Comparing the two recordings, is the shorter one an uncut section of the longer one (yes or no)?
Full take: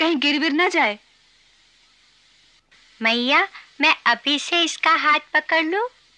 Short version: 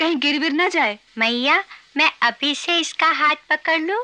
no